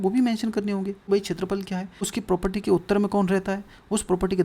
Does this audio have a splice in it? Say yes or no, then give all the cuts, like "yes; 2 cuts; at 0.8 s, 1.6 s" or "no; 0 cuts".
yes; 2 cuts; at 1.0 s, 2.1 s